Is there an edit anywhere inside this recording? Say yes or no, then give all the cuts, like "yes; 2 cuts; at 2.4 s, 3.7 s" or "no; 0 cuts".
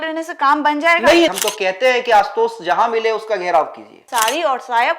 yes; 2 cuts; at 1.3 s, 4.0 s